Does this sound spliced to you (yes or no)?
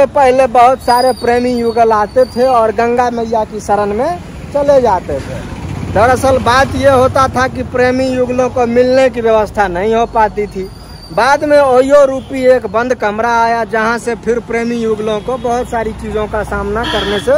no